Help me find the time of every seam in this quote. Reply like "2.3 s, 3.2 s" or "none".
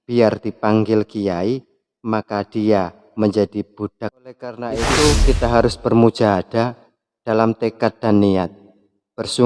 4.8 s